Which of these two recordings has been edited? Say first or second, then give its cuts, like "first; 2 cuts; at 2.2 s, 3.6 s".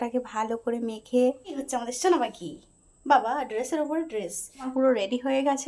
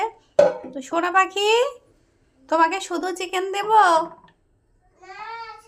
first; 2 cuts; at 1.6 s, 4.7 s